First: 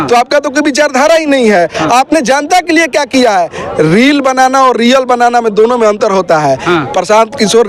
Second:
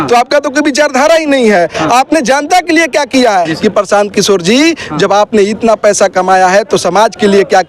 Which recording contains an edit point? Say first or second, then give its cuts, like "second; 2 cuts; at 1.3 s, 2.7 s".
second; 1 cut; at 3.5 s